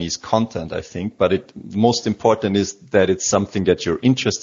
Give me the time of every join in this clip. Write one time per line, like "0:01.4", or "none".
none